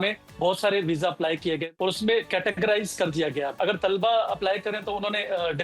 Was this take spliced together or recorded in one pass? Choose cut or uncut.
cut